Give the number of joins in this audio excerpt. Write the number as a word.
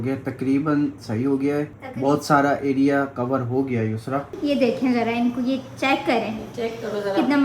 one